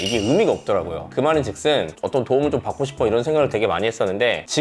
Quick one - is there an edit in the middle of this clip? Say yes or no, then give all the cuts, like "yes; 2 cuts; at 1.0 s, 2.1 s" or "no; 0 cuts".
no; 0 cuts